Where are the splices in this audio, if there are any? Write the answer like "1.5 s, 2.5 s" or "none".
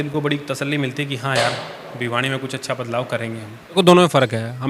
3.8 s